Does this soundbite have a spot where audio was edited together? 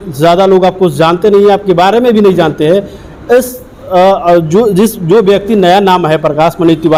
no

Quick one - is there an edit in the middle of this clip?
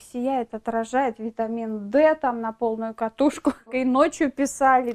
yes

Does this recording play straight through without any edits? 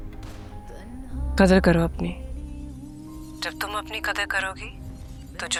yes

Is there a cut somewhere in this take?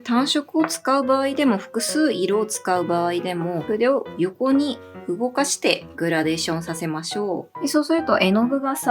yes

